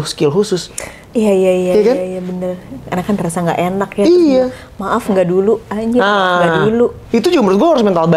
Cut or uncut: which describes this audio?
uncut